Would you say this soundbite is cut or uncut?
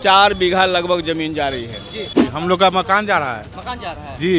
cut